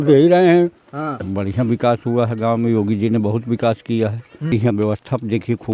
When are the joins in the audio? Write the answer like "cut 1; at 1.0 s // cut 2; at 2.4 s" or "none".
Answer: cut 1; at 1.2 s // cut 2; at 4.5 s